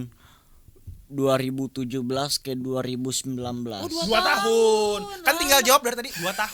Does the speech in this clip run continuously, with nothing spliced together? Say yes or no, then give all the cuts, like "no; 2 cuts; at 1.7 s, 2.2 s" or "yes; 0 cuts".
yes; 0 cuts